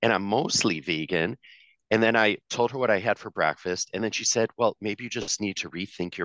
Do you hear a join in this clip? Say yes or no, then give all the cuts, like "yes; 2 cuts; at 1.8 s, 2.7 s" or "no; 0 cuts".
no; 0 cuts